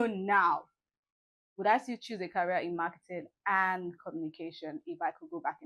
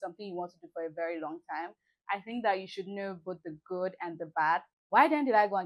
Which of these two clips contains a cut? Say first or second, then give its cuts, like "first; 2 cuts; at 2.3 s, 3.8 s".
second; 1 cut; at 4.8 s